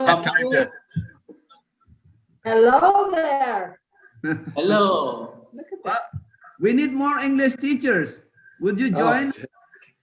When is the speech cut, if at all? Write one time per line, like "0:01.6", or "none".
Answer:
none